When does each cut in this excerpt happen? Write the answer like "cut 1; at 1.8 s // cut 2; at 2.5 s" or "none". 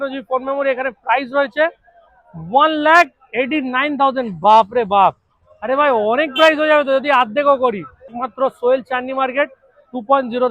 cut 1; at 8.2 s